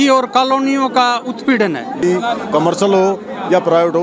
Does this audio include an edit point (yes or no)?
yes